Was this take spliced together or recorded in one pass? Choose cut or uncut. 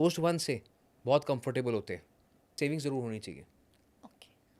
cut